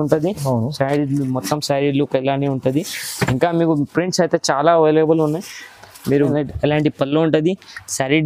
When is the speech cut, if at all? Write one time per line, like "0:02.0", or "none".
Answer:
0:06.2